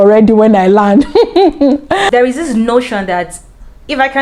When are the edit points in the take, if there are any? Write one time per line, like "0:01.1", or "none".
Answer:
0:02.1